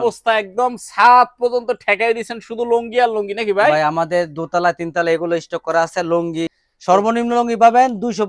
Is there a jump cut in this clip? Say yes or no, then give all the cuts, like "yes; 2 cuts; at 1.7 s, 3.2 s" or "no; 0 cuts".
yes; 1 cut; at 6.5 s